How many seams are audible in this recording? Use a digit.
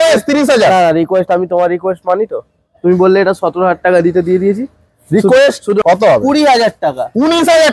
1